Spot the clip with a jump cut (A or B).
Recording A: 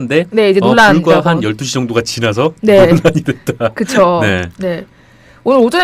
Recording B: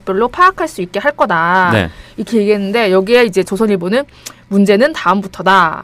A